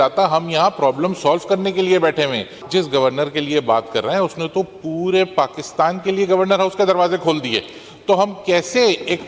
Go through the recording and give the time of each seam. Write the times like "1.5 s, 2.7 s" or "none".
2.6 s

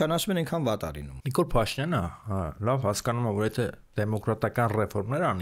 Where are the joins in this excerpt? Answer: 1.2 s

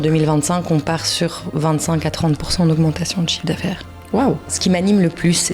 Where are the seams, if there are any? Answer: 4.5 s

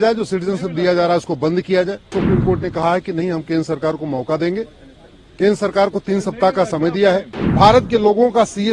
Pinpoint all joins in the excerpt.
2.1 s, 7.4 s

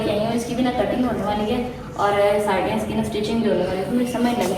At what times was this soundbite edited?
none

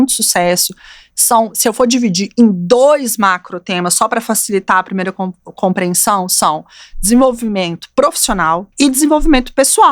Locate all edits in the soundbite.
8.7 s

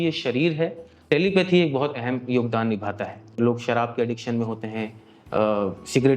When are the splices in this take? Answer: 1.0 s, 3.4 s

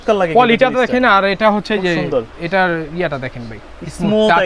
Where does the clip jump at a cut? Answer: none

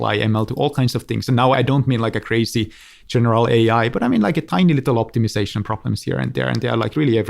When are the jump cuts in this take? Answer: 1.5 s

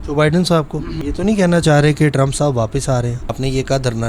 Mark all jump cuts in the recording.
0.9 s, 3.4 s

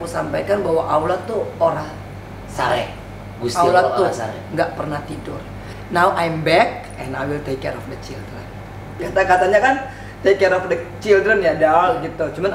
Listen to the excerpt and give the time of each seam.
5.7 s, 9.0 s

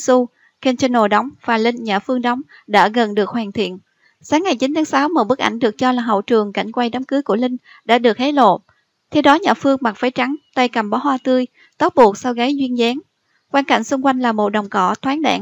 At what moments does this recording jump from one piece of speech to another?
7.2 s

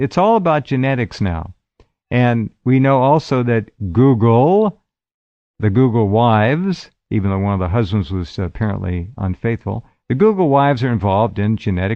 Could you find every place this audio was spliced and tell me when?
none

